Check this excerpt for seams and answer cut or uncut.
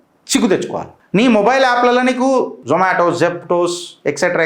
cut